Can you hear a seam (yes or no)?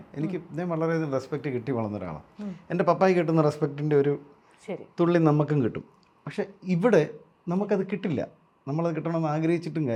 no